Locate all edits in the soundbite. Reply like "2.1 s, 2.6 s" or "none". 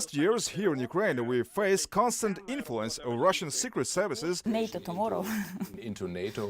4.4 s